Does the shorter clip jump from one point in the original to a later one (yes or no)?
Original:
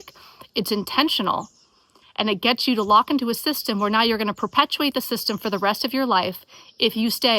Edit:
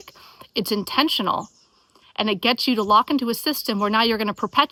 no